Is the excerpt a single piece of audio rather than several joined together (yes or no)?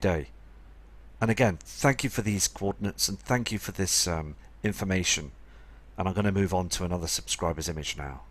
no